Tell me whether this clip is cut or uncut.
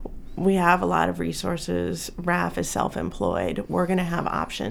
uncut